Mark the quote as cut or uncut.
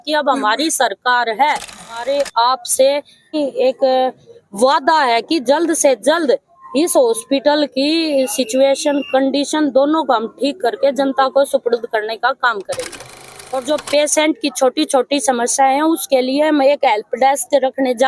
cut